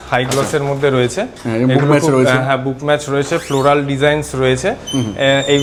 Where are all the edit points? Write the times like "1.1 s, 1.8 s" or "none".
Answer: none